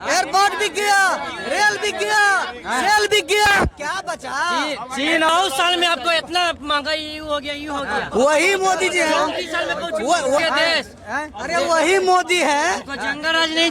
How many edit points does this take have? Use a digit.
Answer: 2